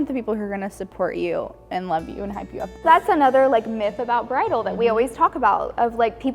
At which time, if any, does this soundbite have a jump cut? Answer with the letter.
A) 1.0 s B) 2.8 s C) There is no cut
B